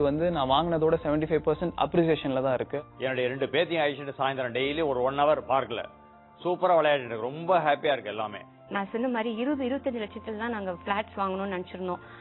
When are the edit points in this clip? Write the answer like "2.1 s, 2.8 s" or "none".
2.7 s, 8.6 s